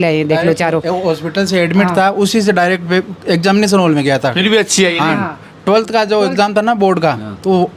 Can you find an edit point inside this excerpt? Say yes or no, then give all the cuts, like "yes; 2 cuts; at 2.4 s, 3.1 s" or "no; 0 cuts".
no; 0 cuts